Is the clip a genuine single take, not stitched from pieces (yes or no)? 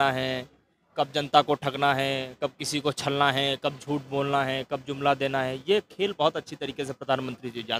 yes